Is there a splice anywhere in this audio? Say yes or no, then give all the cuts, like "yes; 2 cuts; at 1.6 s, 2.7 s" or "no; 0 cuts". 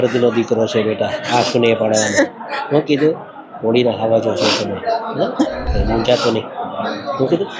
yes; 1 cut; at 5.7 s